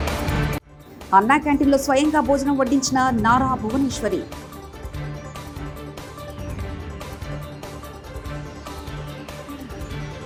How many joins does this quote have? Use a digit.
0